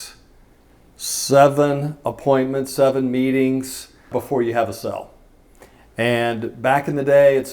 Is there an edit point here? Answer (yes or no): yes